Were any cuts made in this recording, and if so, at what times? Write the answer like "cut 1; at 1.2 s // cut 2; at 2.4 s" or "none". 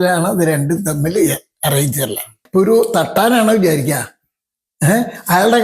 cut 1; at 2.3 s